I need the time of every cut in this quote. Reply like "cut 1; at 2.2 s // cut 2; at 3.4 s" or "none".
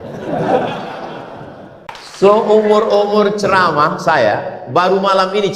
cut 1; at 1.9 s